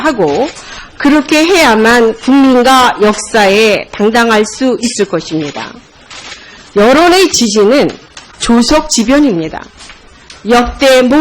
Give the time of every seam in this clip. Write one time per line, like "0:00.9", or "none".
0:03.9